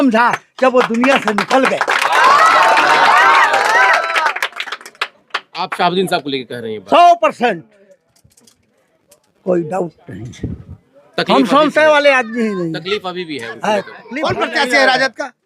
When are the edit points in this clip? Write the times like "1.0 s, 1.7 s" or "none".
14.0 s